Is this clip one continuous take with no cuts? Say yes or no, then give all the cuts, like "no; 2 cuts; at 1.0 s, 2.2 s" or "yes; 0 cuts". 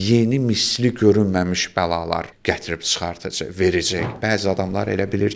no; 2 cuts; at 2.3 s, 4.1 s